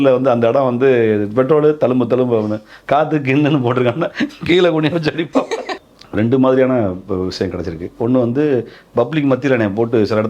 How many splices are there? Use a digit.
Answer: 1